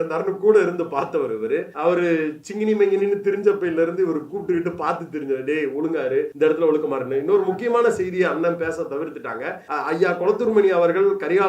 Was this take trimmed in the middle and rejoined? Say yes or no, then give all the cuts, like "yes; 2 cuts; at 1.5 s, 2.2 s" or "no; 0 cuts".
yes; 3 cuts; at 1.7 s, 6.3 s, 9.6 s